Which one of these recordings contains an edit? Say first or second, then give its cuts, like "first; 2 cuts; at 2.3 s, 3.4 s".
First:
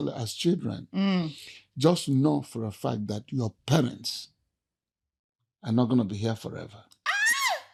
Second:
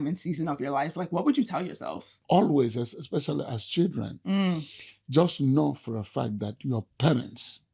second; 1 cut; at 2.2 s